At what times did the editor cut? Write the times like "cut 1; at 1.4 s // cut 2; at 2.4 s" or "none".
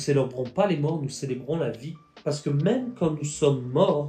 none